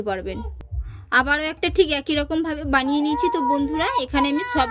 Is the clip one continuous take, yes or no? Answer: yes